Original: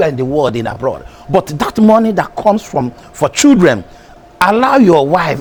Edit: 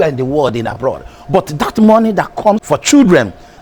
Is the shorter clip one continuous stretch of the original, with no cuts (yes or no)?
no